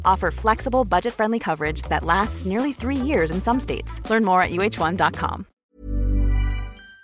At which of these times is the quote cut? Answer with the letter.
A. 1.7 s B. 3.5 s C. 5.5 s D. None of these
C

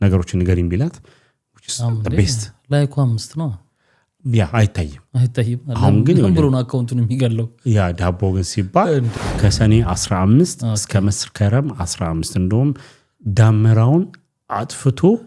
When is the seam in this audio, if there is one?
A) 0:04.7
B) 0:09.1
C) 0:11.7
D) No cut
B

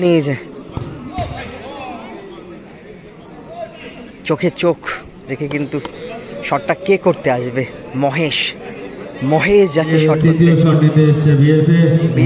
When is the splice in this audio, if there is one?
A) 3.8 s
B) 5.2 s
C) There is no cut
A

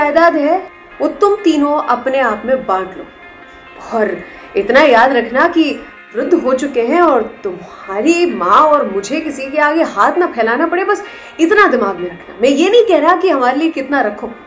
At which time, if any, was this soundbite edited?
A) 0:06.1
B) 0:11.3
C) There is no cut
A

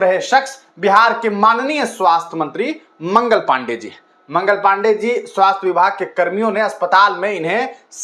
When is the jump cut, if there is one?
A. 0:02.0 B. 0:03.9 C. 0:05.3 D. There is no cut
D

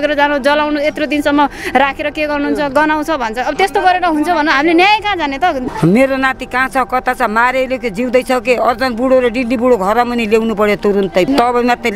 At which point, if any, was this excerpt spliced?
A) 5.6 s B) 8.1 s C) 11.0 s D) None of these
A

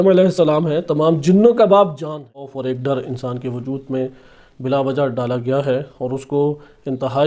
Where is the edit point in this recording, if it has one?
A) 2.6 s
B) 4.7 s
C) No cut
A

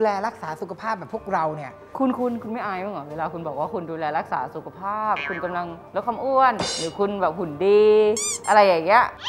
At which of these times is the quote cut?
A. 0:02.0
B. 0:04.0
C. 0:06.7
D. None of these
A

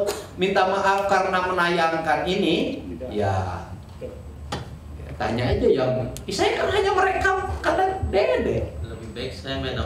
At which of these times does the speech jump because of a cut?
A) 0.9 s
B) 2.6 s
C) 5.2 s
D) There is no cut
D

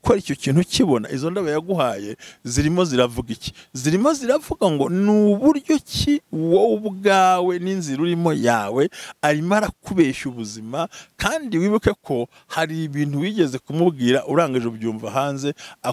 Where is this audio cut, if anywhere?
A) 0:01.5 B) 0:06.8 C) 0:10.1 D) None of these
D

